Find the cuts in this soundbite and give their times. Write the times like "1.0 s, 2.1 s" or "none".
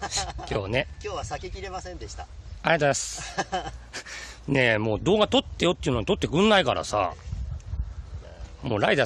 5.5 s